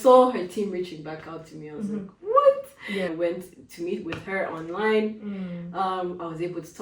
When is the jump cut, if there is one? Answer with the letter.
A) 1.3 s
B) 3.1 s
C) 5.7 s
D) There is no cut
B